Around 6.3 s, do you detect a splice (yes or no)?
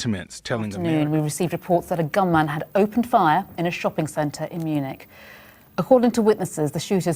yes